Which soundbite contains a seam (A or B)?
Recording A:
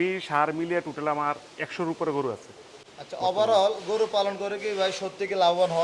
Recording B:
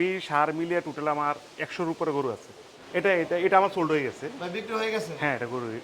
B